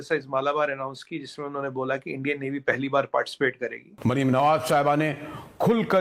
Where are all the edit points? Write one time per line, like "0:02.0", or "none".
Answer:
0:03.9